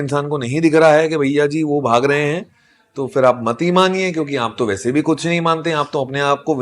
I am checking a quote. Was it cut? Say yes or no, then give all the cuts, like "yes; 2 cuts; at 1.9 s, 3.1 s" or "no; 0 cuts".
no; 0 cuts